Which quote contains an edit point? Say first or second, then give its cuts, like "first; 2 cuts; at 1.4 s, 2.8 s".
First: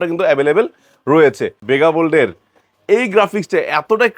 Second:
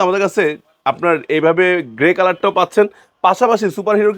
first; 1 cut; at 1.5 s